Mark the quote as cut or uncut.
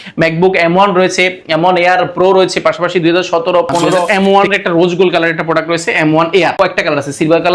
cut